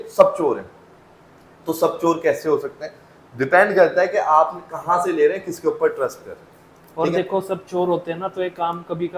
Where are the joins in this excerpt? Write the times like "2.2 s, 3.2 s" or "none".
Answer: none